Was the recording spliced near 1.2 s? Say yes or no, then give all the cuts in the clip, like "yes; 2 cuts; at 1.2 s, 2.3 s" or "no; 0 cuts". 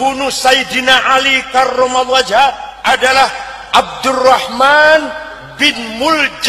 no; 1 cut; at 2.7 s